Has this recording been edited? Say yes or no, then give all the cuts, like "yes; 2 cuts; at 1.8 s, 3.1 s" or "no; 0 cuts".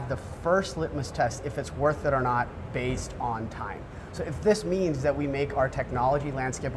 no; 0 cuts